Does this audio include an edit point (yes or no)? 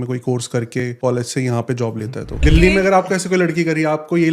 yes